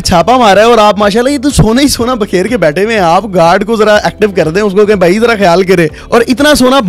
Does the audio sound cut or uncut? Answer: cut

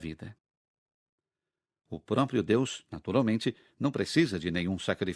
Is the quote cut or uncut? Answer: uncut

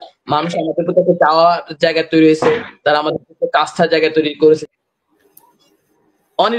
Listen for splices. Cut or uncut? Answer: cut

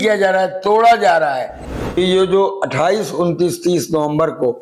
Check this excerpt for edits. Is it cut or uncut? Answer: cut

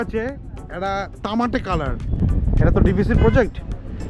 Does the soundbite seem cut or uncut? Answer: cut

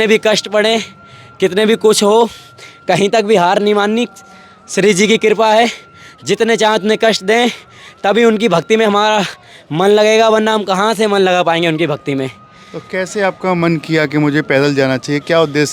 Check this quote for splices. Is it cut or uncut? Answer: uncut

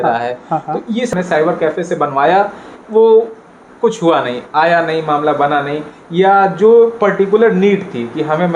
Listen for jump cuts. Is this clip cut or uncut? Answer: cut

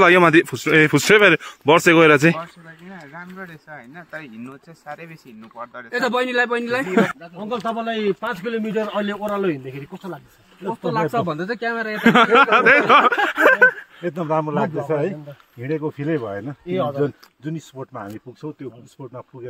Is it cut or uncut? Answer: cut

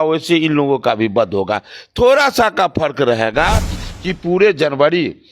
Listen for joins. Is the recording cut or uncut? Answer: cut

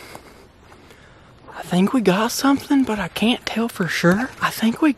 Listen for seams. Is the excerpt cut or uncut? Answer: uncut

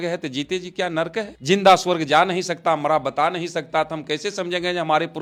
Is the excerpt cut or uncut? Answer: uncut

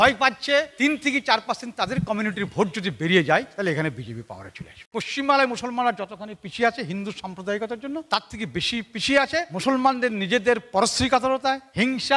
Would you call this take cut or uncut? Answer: cut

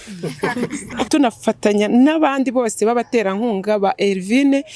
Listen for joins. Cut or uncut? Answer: cut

